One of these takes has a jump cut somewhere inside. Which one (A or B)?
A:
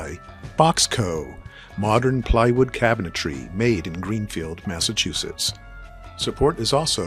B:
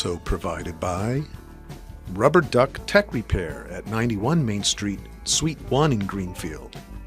B